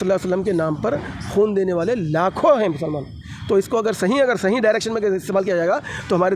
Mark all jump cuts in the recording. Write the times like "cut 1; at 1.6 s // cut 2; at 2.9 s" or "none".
none

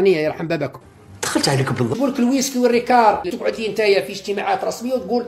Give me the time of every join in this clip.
cut 1; at 1.9 s // cut 2; at 3.3 s

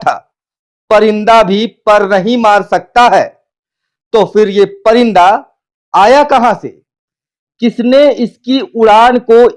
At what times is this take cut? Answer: none

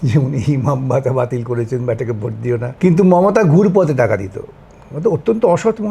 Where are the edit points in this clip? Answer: cut 1; at 2.7 s

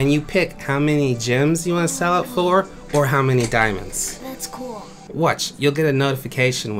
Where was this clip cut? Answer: cut 1; at 5.0 s

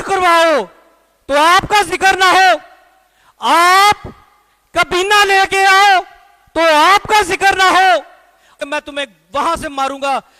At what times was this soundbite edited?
cut 1; at 8.5 s

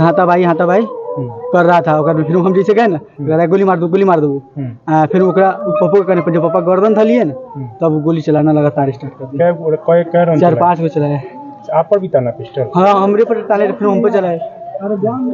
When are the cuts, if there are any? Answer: none

